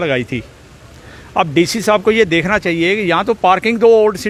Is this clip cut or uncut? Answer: uncut